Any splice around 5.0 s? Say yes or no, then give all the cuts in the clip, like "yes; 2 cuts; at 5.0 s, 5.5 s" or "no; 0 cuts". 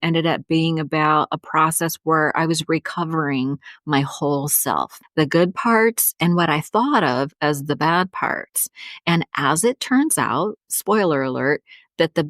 yes; 1 cut; at 5.0 s